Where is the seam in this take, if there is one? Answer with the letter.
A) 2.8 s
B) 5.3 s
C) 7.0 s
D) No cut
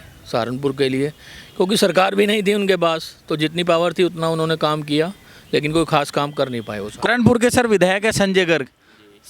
C